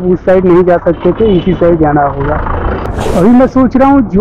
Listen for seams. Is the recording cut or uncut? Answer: cut